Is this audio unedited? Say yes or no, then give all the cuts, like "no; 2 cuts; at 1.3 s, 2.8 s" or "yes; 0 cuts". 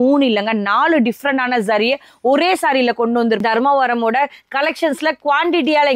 no; 1 cut; at 3.4 s